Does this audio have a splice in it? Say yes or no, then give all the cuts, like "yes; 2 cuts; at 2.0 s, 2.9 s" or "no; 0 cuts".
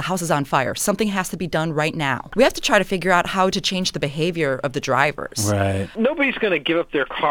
yes; 2 cuts; at 2.2 s, 5.9 s